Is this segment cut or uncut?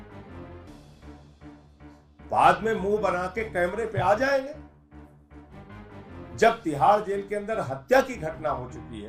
uncut